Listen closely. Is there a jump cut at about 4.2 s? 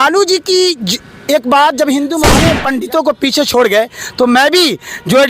no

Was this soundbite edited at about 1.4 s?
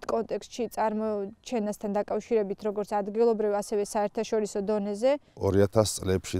no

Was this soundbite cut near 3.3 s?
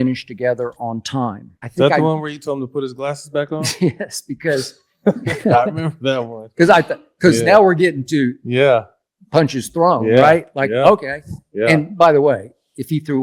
no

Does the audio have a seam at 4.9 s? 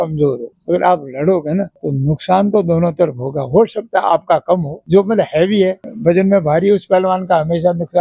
no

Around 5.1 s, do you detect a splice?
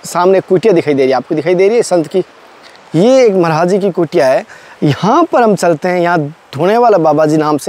no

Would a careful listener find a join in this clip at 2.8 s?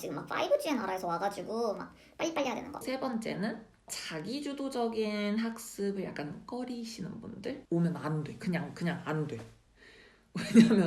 yes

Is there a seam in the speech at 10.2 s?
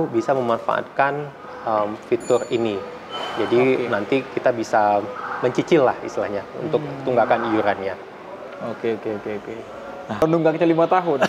yes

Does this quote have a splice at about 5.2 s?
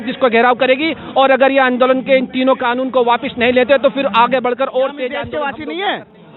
yes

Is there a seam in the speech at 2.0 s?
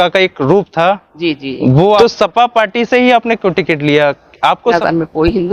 yes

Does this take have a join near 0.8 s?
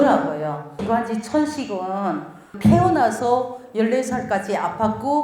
yes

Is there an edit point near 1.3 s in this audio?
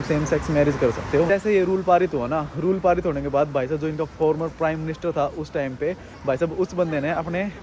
yes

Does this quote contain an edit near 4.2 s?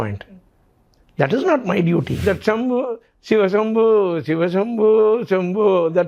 no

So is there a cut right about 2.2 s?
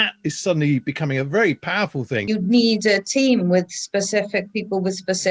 yes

